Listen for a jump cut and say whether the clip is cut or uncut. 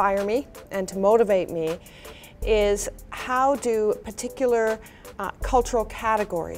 uncut